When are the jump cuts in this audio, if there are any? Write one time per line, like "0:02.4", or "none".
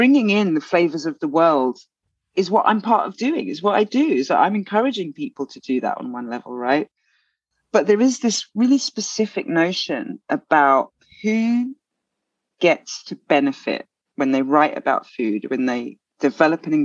none